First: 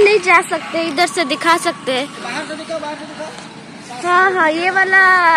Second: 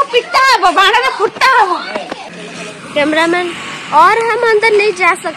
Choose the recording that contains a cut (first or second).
second